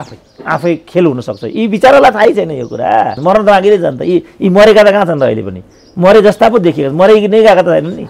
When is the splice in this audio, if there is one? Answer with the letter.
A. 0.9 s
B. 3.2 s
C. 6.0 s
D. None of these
B